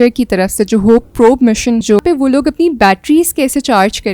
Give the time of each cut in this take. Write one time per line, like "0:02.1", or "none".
0:02.0